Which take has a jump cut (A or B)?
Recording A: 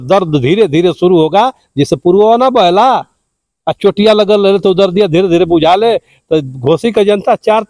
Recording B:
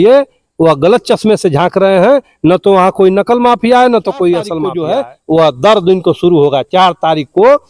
B